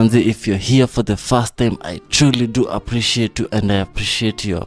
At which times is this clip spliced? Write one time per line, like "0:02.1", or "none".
none